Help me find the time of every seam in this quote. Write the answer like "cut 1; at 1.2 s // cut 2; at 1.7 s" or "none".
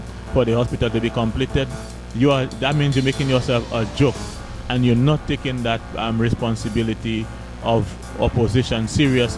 none